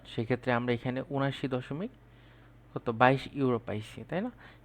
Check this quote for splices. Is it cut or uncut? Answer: uncut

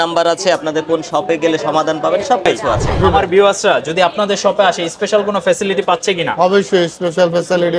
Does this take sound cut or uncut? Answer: cut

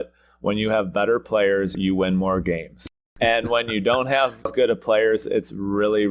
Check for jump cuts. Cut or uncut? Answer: cut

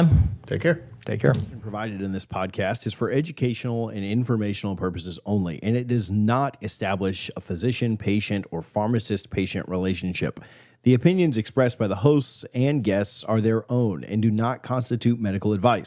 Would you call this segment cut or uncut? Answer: cut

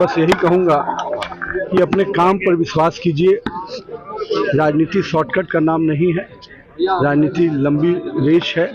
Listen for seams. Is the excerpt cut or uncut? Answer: uncut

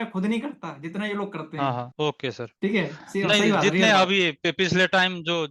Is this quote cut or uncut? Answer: cut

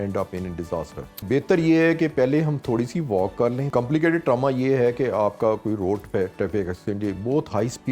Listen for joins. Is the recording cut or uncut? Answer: cut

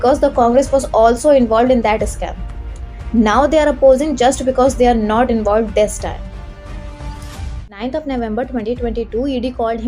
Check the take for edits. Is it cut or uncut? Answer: cut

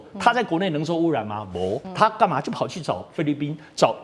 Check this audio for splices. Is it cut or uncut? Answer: cut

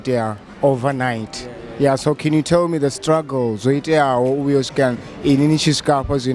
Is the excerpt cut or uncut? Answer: uncut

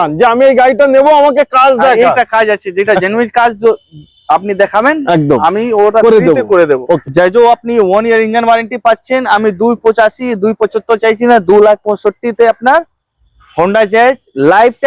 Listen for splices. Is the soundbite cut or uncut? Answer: cut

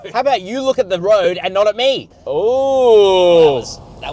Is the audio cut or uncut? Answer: cut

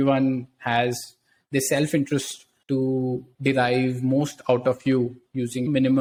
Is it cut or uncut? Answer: uncut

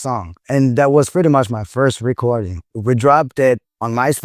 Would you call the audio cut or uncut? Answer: cut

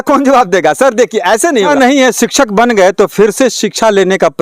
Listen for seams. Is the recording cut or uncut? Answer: cut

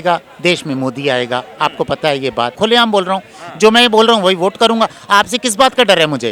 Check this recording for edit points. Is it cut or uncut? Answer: cut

